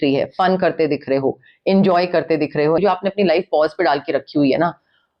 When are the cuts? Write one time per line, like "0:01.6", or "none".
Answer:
0:02.8